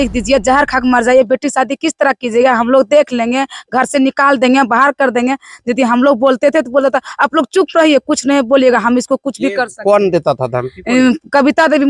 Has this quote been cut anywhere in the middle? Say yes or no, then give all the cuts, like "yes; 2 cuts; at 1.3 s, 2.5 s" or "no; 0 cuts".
no; 0 cuts